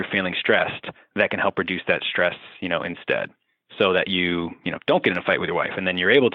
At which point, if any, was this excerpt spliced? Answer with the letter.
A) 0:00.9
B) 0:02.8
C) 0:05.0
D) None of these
D